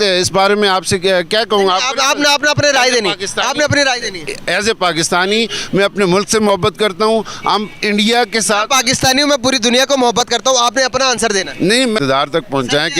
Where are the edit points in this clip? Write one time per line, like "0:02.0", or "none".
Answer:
0:12.0